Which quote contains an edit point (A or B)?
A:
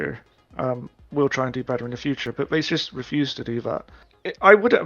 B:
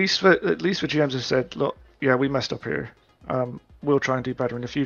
A